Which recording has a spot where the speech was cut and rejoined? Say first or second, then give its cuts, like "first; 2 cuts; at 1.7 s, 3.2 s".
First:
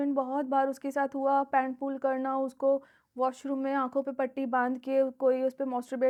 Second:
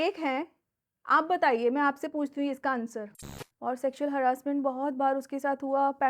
second; 1 cut; at 3.1 s